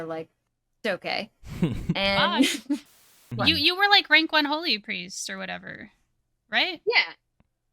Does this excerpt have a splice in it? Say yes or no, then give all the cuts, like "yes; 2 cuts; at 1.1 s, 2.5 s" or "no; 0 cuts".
yes; 1 cut; at 2.8 s